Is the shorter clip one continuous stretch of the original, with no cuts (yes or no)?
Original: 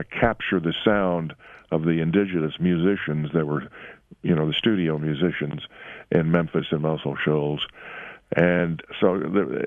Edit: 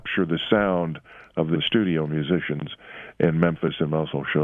no